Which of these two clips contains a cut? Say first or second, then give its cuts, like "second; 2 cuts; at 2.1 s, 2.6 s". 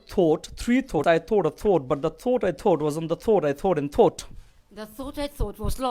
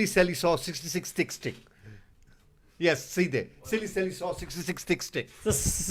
first; 1 cut; at 1.0 s